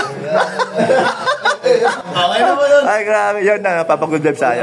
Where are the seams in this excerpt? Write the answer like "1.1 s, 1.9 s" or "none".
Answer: 2.0 s